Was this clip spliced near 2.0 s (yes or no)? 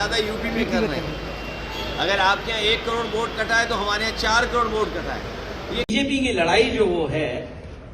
no